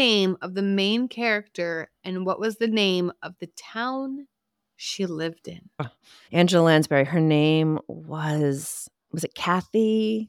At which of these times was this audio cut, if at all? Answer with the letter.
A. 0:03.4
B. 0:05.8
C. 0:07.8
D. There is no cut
B